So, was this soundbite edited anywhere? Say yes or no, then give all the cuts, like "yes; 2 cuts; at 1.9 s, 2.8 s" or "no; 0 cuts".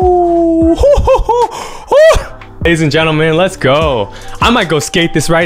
yes; 1 cut; at 2.6 s